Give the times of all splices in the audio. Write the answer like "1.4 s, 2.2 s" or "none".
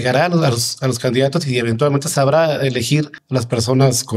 3.2 s